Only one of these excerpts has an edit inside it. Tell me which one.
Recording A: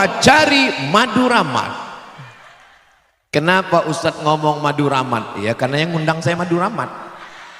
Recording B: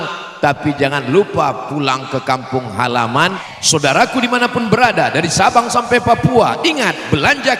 B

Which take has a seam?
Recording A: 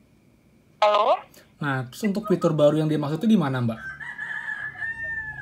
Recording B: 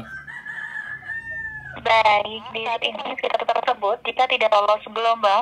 B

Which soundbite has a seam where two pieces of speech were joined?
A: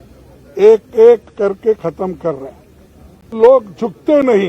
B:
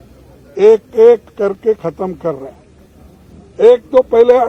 A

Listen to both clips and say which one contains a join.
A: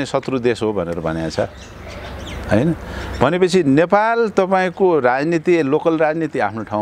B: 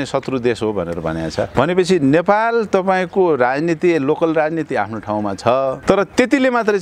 B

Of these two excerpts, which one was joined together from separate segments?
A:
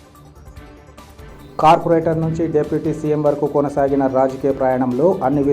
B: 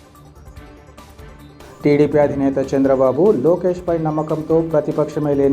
A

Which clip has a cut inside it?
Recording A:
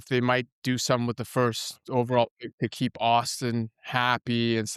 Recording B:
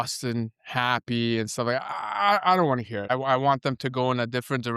B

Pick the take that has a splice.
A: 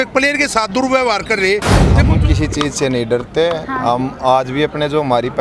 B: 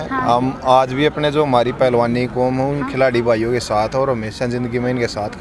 A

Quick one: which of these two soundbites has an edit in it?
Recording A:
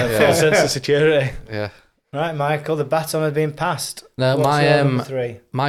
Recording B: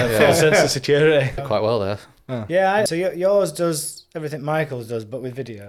B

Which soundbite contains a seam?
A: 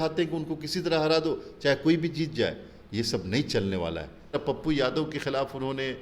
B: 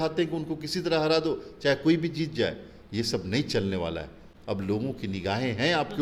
A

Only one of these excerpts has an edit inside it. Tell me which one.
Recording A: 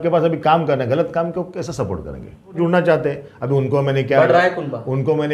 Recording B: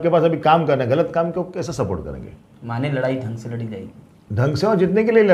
A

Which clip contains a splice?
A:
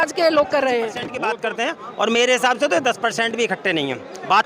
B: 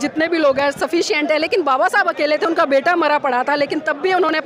A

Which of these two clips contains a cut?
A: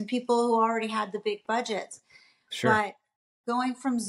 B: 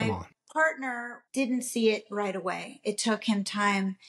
B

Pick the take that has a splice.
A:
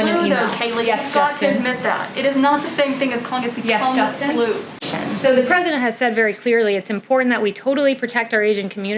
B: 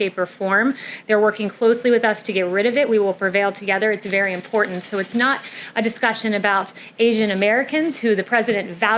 A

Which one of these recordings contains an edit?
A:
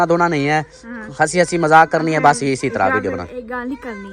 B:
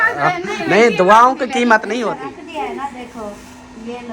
B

